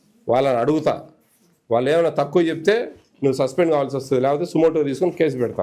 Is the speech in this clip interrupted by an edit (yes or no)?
no